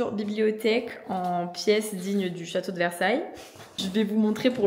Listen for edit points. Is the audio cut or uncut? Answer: uncut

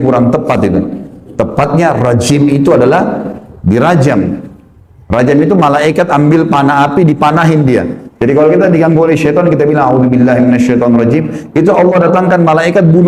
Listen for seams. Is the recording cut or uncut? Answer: uncut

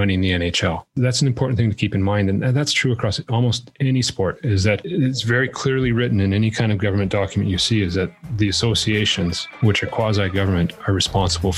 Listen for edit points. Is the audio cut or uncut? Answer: cut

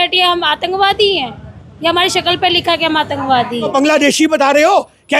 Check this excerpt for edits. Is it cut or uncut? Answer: cut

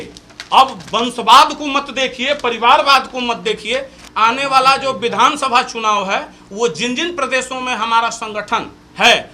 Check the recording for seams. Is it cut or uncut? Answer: cut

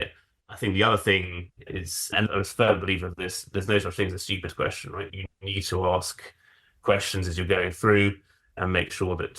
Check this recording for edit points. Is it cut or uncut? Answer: cut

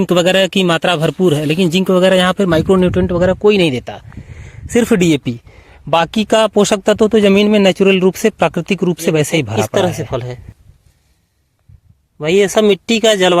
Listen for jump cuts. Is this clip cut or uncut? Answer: cut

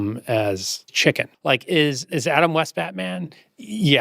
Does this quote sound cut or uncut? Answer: cut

